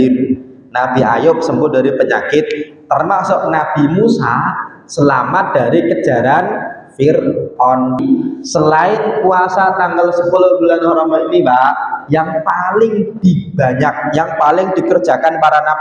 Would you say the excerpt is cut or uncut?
cut